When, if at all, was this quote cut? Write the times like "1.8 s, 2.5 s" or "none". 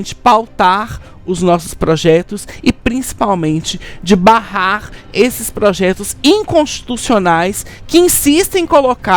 none